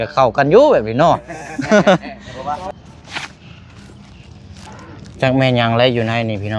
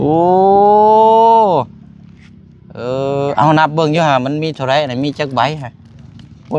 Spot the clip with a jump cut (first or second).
first